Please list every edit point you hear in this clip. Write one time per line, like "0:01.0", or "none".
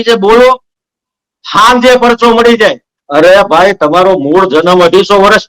0:02.9